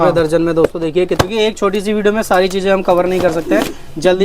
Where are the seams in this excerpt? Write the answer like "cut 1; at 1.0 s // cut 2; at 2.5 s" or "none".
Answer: cut 1; at 1.1 s